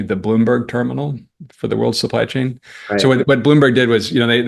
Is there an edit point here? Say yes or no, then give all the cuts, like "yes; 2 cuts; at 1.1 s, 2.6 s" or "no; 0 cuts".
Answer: no; 0 cuts